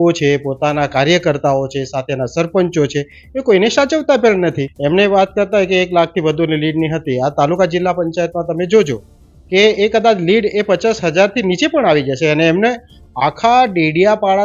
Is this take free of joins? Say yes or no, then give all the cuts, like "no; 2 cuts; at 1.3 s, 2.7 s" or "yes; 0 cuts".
no; 1 cut; at 4.7 s